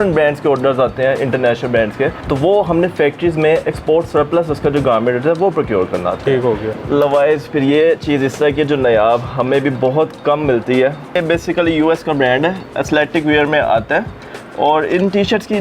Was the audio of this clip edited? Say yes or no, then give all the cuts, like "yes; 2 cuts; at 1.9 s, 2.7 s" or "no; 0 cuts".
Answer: yes; 3 cuts; at 2.2 s, 6.7 s, 11.2 s